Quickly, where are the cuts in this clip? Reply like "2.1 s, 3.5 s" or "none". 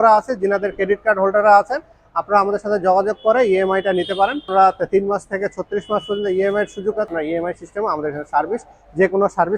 4.5 s, 7.1 s